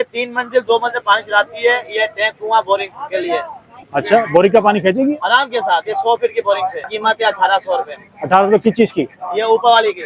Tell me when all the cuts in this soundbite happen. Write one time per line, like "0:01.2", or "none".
0:06.9